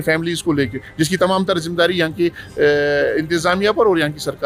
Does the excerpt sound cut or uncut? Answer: uncut